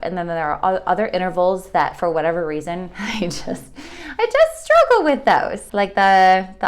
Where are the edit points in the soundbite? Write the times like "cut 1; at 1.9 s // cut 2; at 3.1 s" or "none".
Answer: cut 1; at 5.6 s